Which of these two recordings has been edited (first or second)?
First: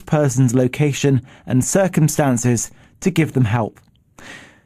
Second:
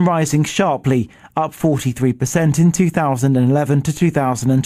first